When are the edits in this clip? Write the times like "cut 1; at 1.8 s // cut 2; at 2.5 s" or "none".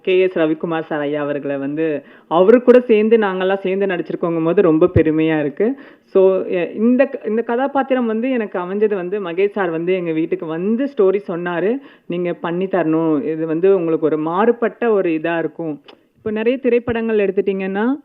none